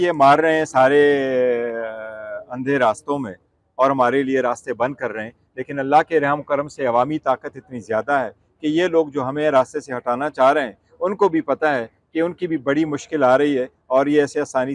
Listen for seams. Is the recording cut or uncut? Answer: uncut